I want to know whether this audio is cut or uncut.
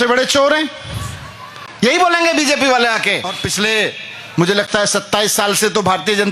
cut